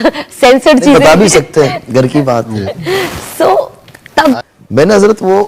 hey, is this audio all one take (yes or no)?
no